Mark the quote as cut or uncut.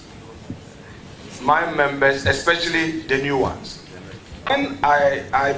cut